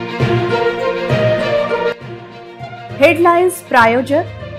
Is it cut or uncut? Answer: uncut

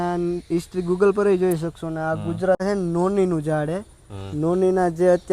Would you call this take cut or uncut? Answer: cut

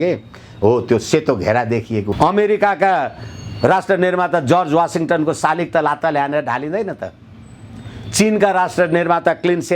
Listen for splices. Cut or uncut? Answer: cut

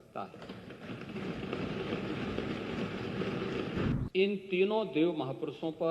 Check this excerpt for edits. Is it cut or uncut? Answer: cut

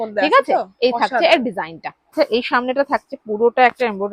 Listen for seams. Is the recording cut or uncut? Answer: cut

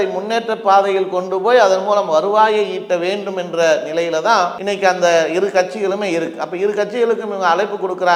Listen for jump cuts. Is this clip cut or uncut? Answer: uncut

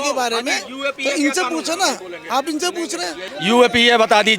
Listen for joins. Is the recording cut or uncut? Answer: cut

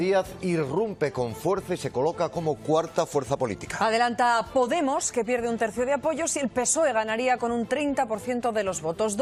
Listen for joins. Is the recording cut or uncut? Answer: uncut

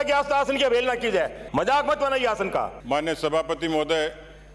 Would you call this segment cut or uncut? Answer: cut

